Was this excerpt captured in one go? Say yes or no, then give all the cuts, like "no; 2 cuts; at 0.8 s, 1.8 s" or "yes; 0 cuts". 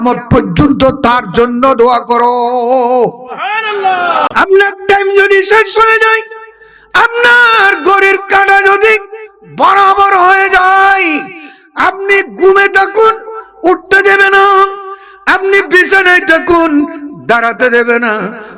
no; 1 cut; at 4.3 s